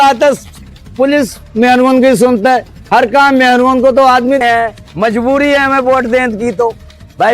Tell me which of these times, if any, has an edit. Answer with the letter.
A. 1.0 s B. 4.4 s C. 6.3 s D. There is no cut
B